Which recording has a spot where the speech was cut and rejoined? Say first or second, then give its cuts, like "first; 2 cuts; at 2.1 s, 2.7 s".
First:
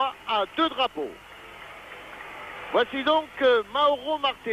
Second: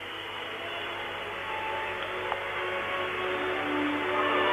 first; 1 cut; at 2.8 s